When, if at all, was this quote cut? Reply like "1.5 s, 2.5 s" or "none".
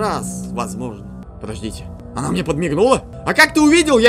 1.4 s, 3.2 s